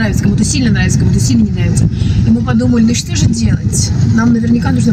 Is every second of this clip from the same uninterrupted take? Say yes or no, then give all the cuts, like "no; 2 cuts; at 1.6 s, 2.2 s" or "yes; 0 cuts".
yes; 0 cuts